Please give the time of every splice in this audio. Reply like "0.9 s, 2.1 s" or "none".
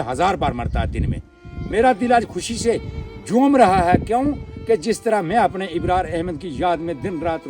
none